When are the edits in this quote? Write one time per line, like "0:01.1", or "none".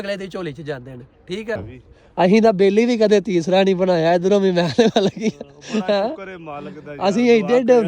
0:01.6